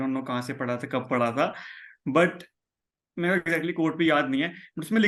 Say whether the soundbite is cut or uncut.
uncut